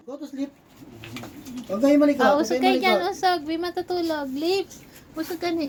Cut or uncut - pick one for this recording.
uncut